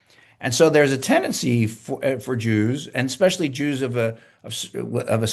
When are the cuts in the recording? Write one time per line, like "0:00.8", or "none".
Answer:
none